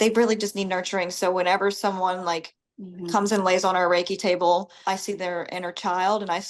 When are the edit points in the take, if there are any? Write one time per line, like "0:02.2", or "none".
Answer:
0:04.7